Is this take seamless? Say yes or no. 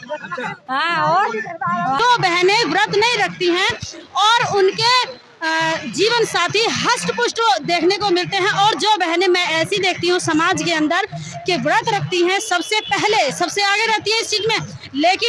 no